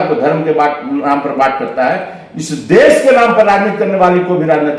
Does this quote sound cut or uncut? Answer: uncut